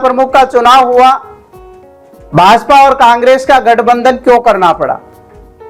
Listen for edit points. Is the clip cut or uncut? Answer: uncut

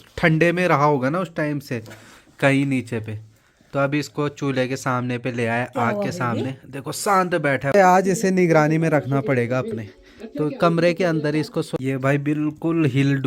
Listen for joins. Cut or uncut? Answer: cut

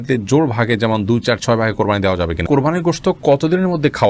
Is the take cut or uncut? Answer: cut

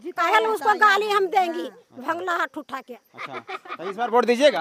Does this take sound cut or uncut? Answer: uncut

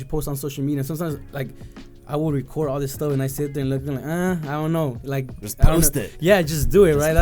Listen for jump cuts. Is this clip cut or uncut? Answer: uncut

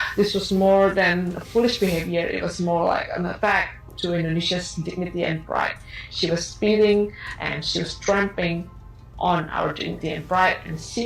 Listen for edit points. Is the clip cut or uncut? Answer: uncut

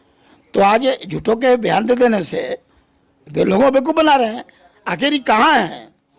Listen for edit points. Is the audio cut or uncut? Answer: uncut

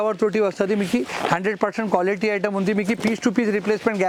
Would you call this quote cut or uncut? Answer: uncut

